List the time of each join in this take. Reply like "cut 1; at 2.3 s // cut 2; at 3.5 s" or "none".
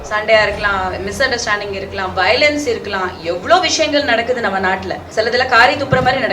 cut 1; at 5.0 s